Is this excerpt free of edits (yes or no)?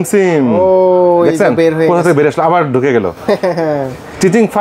yes